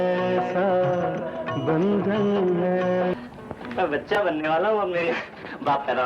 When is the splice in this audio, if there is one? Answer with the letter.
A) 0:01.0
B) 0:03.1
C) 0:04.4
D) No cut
B